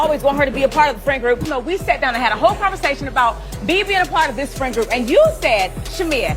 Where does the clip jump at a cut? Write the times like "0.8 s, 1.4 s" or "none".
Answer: 1.5 s